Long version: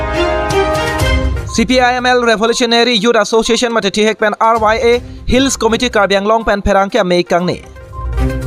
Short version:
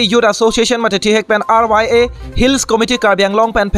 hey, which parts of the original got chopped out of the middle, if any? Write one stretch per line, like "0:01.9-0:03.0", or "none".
none

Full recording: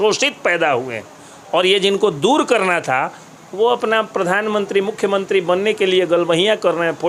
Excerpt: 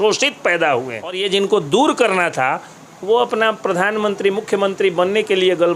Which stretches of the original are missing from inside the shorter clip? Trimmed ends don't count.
0:01.2-0:01.7

